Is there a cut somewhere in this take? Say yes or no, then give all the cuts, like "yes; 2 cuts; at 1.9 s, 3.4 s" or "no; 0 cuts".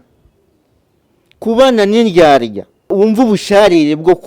yes; 1 cut; at 2.8 s